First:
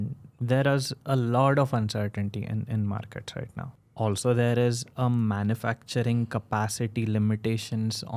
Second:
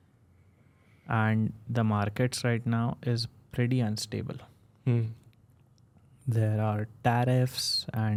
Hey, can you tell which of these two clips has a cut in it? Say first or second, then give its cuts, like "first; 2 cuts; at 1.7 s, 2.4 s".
first; 1 cut; at 3.8 s